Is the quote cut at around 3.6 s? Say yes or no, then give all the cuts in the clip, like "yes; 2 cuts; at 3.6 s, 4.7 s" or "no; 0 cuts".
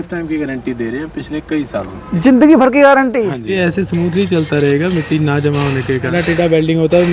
yes; 2 cuts; at 3.6 s, 6.1 s